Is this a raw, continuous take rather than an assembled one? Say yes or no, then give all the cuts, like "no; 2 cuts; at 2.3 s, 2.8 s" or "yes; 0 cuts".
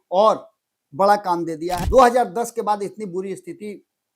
no; 1 cut; at 1.8 s